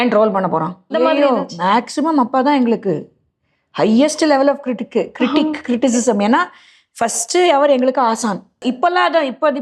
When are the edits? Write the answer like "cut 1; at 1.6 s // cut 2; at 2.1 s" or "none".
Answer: cut 1; at 0.9 s // cut 2; at 8.6 s